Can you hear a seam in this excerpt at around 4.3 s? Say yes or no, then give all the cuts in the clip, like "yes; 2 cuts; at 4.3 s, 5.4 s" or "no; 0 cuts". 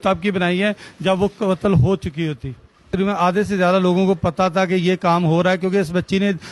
no; 1 cut; at 2.9 s